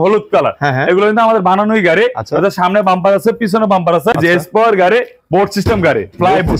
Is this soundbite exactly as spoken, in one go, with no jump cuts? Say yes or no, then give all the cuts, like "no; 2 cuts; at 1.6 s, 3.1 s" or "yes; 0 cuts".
no; 1 cut; at 4.1 s